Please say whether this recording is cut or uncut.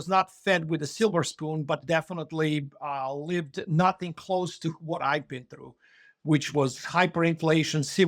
uncut